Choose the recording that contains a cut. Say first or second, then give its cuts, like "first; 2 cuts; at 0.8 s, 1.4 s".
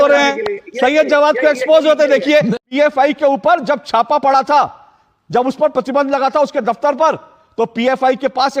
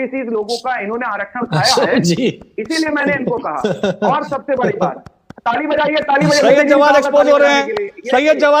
first; 1 cut; at 2.6 s